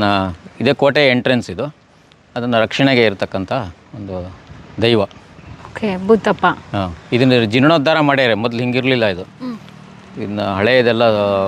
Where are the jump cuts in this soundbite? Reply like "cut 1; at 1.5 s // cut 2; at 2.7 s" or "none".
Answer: none